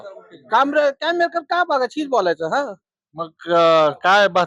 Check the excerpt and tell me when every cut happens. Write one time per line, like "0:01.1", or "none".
none